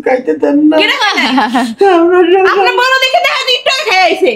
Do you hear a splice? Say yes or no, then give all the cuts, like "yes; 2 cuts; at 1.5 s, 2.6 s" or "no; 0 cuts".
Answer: no; 0 cuts